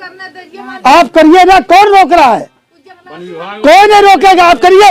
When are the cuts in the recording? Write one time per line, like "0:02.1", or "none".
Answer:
none